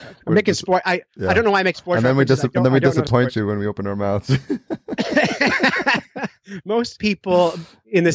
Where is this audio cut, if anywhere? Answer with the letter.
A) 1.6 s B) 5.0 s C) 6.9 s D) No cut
C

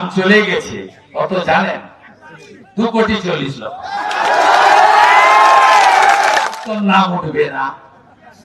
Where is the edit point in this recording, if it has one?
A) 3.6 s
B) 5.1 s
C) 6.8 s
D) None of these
C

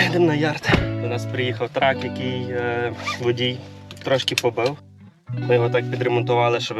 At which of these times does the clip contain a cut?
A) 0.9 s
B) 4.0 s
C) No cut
A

